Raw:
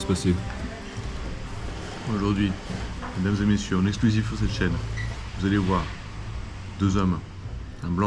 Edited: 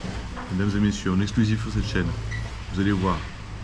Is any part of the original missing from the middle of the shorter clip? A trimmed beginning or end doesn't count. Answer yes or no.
no